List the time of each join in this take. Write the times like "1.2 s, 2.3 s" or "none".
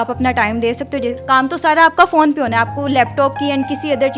1.1 s